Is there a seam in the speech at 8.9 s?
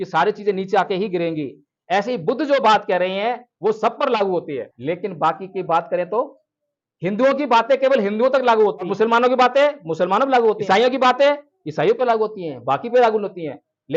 yes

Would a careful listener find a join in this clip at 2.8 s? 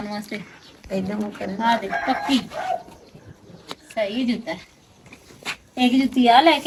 no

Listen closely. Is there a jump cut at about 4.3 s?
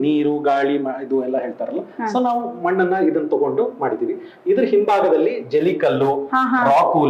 no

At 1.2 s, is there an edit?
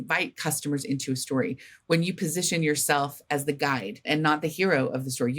no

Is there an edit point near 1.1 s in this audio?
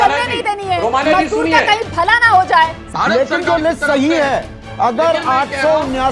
no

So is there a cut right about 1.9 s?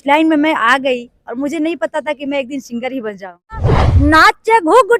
no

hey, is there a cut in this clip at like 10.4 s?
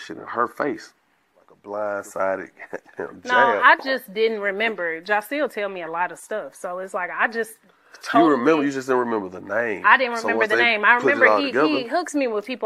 no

